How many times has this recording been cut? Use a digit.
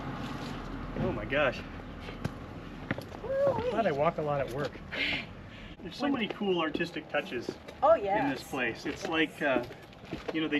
1